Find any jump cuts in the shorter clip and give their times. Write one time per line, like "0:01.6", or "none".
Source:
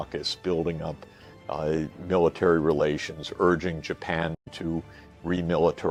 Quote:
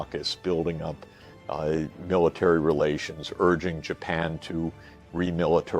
0:04.4